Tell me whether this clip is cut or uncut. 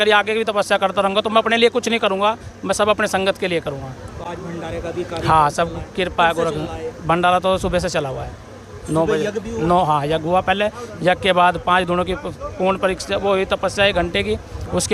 uncut